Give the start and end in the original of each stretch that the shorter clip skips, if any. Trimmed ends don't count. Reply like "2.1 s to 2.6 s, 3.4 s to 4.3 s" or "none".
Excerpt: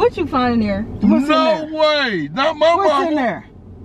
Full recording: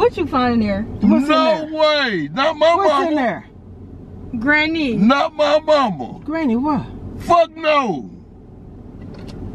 none